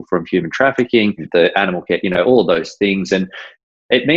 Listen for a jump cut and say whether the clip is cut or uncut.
cut